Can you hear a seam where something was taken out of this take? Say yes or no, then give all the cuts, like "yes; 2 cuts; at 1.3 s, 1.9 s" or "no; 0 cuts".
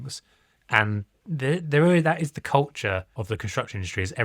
yes; 1 cut; at 3.1 s